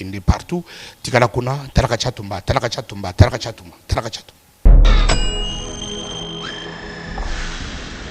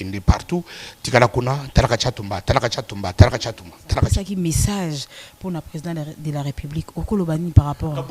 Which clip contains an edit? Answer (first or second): second